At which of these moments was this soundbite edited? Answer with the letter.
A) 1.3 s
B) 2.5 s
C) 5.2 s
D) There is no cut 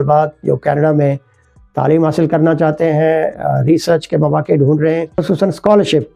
C